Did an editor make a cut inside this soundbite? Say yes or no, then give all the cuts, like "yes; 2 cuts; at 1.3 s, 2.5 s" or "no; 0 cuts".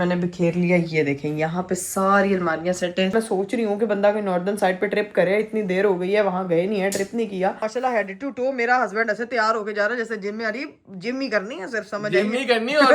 yes; 2 cuts; at 3.2 s, 7.6 s